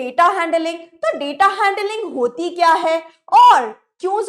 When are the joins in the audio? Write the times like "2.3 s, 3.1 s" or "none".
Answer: none